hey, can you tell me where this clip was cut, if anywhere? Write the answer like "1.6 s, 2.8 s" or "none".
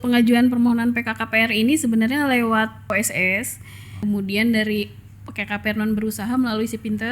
2.9 s, 4.0 s